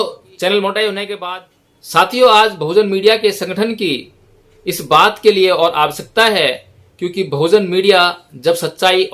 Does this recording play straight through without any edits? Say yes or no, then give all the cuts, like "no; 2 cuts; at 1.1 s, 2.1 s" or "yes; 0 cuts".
no; 1 cut; at 1.6 s